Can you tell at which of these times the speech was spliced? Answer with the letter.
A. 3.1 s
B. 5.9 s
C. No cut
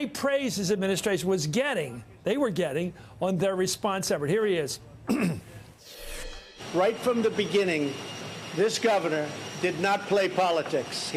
B